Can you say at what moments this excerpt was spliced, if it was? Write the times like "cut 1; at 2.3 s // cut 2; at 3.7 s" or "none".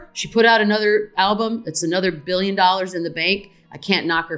none